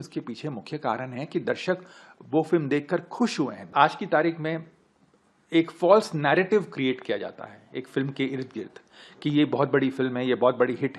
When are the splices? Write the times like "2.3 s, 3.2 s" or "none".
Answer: 3.7 s